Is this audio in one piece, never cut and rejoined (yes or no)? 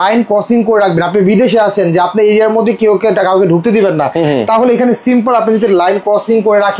yes